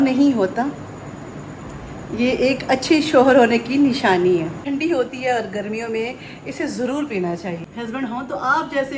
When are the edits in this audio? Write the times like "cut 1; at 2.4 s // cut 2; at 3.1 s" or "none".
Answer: cut 1; at 4.6 s // cut 2; at 7.6 s